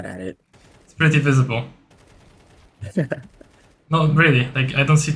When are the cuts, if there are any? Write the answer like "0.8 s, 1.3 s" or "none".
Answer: none